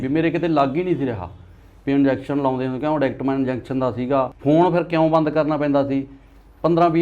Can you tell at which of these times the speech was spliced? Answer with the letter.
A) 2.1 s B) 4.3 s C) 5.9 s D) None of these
B